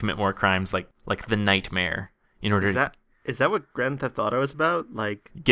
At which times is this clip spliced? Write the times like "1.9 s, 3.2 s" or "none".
0.9 s